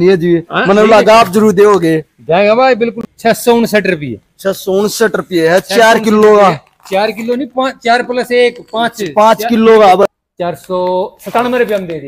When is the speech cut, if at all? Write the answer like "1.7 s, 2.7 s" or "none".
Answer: 3.0 s, 10.0 s